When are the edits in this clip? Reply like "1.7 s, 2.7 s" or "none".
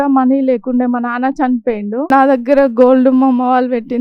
2.1 s